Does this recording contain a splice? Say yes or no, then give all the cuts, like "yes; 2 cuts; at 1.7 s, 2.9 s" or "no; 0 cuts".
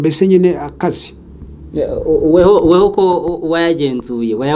no; 0 cuts